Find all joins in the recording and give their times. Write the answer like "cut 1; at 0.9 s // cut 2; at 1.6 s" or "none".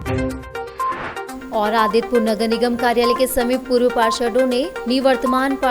none